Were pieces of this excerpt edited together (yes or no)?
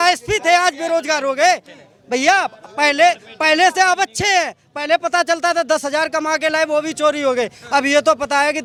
no